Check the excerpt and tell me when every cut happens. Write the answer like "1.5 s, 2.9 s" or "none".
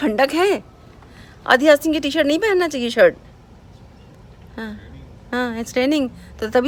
none